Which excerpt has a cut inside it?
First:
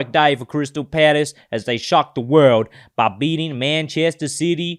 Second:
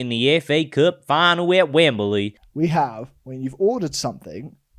second; 1 cut; at 2.4 s

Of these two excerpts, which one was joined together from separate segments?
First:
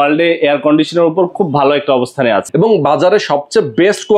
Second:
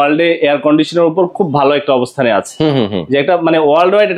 first; 1 cut; at 2.5 s

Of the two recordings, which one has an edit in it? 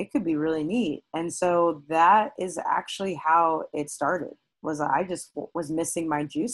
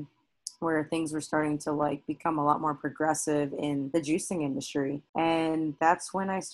second; 2 cuts; at 3.9 s, 5.0 s

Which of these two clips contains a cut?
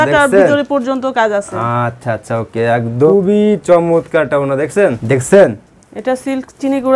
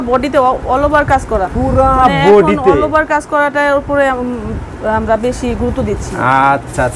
first; 2 cuts; at 3.1 s, 5.0 s

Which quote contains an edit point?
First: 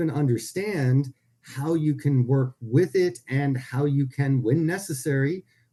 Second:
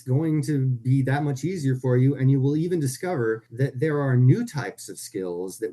second; 1 cut; at 3.5 s

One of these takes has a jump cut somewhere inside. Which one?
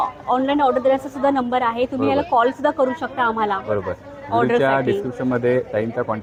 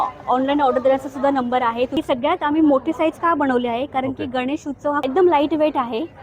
second; 2 cuts; at 2.0 s, 5.0 s

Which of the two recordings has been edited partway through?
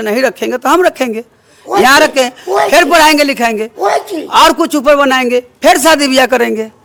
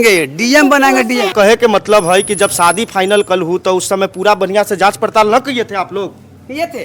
second; 1 cut; at 1.3 s

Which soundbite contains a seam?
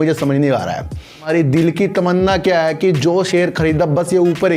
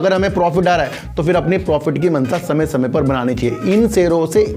first; 1 cut; at 1.3 s

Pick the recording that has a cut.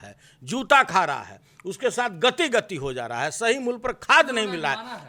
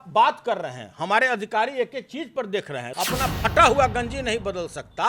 second; 1 cut; at 2.9 s

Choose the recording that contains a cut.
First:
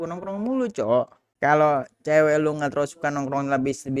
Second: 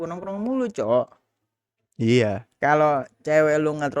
first; 1 cut; at 1.3 s

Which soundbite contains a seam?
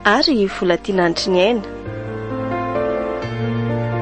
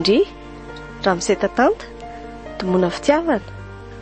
first; 1 cut; at 1.7 s

